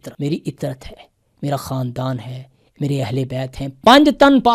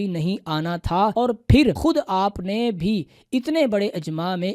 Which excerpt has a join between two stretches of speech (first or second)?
second